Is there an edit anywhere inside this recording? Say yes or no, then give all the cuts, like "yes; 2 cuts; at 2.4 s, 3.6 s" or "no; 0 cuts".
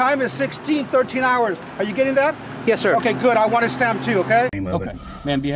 yes; 1 cut; at 4.5 s